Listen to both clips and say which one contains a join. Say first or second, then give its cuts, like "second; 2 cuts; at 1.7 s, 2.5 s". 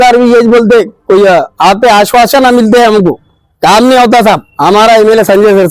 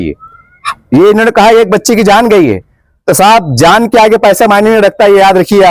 first; 1 cut; at 4.5 s